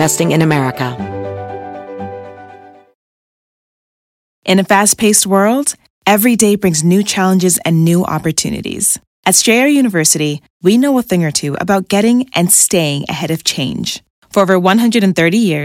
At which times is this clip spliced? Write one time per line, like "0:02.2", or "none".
0:00.9